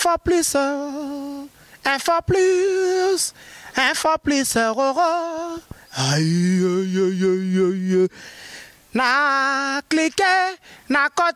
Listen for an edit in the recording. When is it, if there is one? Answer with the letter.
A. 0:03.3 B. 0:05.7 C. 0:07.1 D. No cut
D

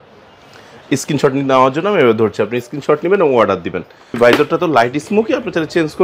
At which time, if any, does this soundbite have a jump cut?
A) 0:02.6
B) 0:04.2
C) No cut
B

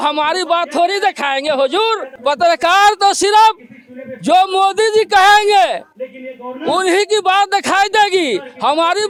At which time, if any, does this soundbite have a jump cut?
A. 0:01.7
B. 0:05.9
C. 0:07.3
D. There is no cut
D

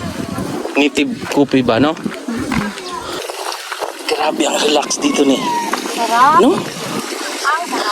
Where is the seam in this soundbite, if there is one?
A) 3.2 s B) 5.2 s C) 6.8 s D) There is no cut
A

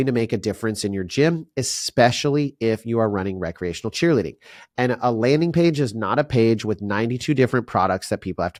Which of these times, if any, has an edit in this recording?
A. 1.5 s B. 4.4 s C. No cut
C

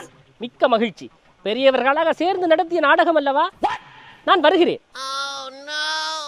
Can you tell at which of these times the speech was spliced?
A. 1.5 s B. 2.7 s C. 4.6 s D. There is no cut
D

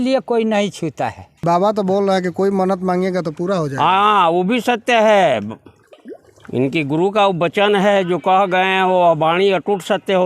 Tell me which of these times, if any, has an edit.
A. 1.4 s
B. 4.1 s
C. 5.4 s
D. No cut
A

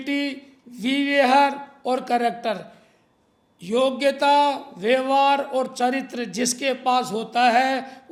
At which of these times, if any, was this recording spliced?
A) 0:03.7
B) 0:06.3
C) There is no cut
C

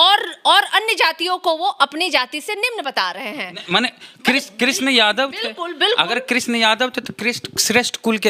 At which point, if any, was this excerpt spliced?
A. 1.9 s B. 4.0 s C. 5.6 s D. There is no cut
D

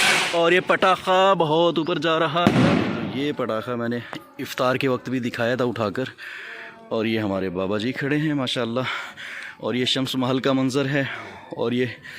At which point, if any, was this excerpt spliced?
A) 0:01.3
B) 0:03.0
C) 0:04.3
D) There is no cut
B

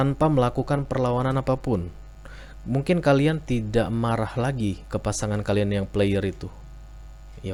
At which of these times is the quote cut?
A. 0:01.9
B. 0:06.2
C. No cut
C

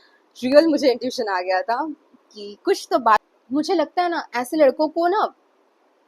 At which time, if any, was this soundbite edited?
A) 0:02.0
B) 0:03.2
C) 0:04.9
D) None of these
B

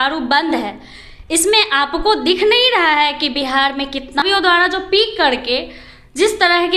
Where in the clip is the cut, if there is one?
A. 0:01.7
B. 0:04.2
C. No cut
B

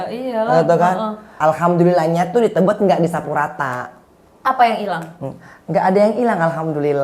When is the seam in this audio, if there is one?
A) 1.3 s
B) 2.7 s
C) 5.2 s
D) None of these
A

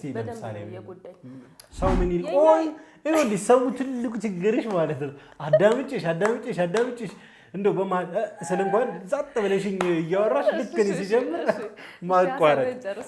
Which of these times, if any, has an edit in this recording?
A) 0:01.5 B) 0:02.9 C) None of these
A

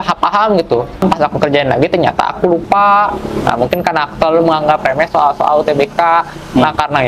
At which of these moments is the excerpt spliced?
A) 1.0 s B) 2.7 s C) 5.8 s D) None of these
A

